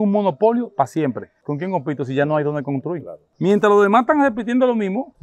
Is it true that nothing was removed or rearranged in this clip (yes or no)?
no